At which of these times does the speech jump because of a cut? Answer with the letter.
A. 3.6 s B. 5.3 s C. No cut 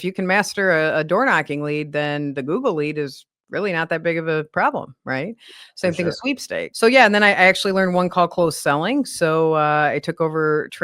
C